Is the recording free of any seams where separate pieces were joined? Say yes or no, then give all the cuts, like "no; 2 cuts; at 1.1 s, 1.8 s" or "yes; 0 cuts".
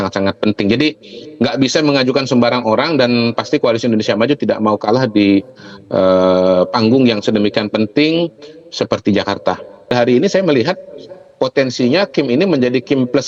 no; 1 cut; at 9.9 s